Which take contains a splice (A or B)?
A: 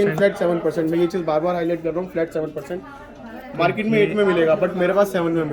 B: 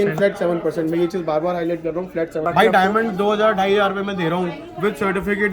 B